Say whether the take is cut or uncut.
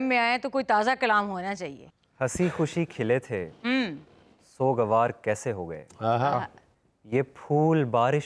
cut